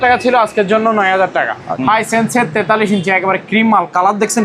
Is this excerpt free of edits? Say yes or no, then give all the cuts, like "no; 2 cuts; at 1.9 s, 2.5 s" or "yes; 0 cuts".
no; 1 cut; at 1.6 s